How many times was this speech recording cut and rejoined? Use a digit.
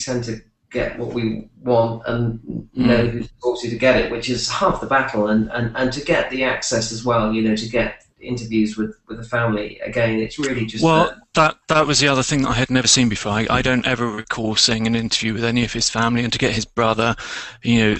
1